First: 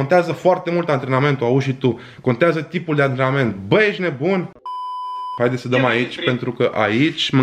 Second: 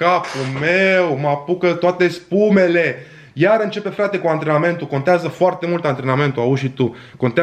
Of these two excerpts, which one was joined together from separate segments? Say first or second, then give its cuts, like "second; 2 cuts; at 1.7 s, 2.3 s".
first; 1 cut; at 4.9 s